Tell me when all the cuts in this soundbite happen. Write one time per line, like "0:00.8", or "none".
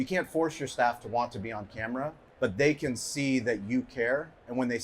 0:02.2